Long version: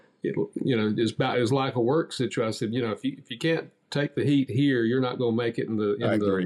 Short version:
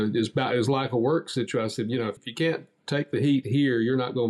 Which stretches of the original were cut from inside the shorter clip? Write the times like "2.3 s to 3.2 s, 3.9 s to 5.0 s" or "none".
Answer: 3.0 s to 3.2 s

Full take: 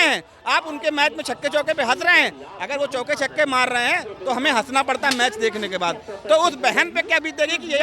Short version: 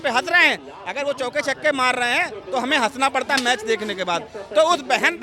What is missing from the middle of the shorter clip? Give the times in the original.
none

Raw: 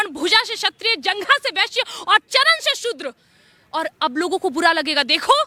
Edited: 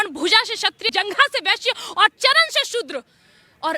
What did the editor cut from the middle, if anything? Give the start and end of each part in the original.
0.9 s to 1.0 s

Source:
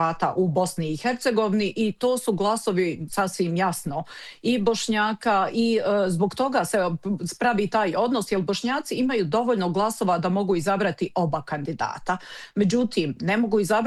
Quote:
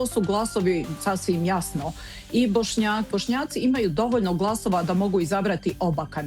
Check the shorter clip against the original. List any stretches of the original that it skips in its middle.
5.2 s to 8.4 s

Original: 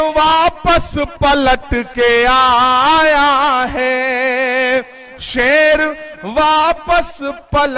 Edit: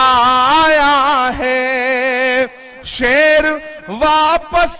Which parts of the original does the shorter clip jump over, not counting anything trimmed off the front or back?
none

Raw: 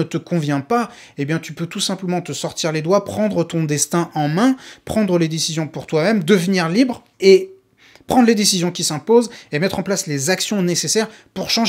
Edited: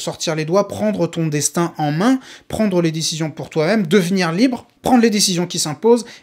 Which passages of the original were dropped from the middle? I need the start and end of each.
7.0 s to 7.9 s

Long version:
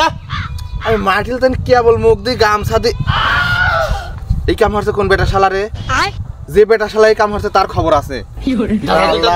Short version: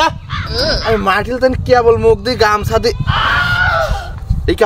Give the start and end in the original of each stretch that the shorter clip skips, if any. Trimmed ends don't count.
none

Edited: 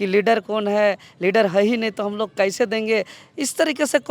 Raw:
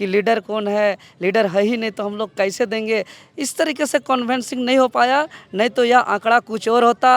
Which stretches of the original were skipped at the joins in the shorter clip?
none

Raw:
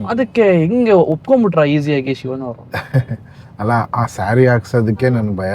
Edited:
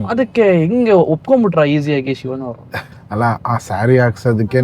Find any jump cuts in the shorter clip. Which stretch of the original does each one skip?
2.7 s to 3.2 s

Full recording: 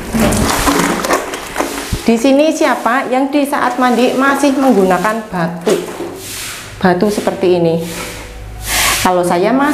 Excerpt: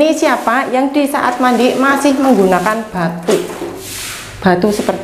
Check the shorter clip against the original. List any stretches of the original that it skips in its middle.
none

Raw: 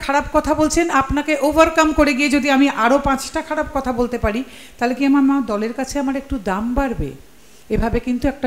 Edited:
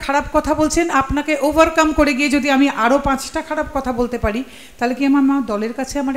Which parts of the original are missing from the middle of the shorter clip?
none

